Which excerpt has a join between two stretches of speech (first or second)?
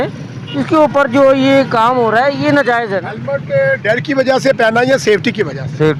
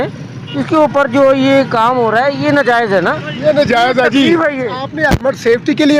first